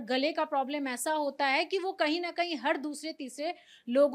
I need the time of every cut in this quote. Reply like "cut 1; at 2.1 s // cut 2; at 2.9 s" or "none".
none